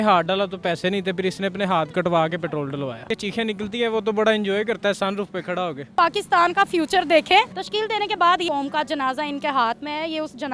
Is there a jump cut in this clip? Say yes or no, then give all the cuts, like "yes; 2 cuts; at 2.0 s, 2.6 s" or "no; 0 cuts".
yes; 3 cuts; at 3.1 s, 5.9 s, 8.4 s